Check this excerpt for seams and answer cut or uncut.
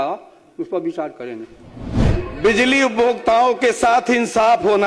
cut